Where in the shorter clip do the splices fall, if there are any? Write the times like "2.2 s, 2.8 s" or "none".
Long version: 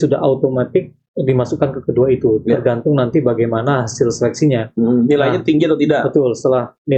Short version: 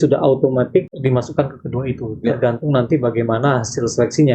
0.9 s